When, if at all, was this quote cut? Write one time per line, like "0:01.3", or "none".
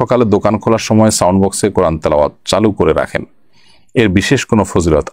none